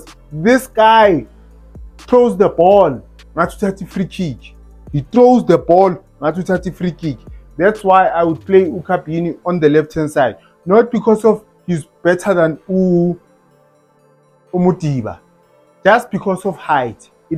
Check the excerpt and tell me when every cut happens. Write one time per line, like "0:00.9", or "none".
none